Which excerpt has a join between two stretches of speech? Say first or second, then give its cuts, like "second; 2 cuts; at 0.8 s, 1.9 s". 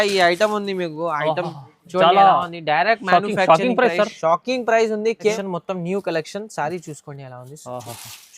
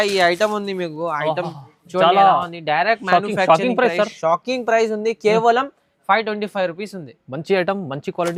first; 1 cut; at 5.3 s